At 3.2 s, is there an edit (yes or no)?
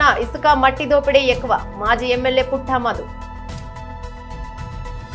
yes